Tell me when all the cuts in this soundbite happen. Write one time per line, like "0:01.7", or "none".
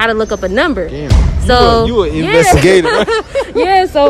none